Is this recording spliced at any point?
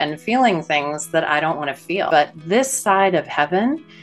yes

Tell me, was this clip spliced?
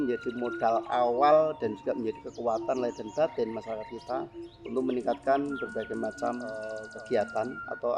yes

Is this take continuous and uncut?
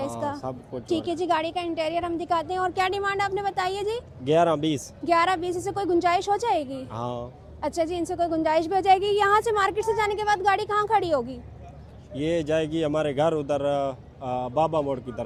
yes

